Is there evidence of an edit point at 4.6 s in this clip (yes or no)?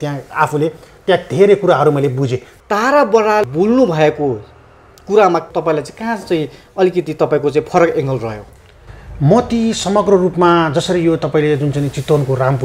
no